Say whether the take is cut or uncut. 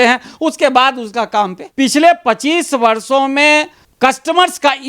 cut